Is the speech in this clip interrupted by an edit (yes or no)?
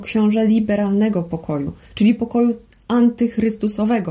no